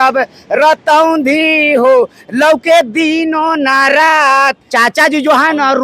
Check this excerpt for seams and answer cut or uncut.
cut